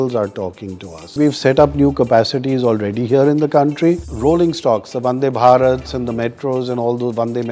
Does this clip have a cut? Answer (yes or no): yes